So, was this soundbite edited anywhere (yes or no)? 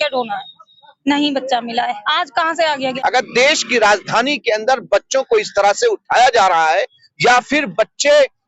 yes